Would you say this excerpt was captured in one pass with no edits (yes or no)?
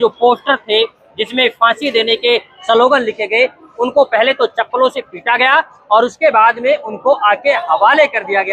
yes